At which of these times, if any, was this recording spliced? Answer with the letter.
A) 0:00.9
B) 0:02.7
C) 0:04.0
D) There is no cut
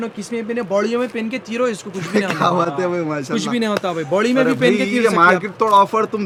D